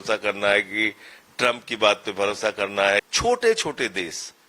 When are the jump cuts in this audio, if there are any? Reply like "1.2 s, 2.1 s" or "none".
3.1 s